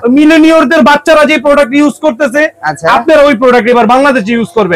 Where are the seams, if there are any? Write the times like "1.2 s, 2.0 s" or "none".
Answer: none